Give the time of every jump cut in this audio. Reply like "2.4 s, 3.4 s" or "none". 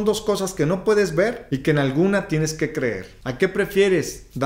3.1 s